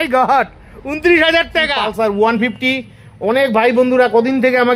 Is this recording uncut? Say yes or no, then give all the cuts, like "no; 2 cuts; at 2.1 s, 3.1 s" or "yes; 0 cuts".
no; 1 cut; at 1.8 s